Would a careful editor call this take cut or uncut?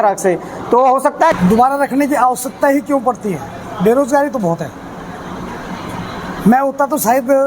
cut